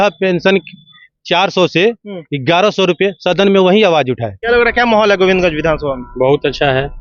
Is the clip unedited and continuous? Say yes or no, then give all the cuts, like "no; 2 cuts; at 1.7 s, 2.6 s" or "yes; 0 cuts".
no; 1 cut; at 4.3 s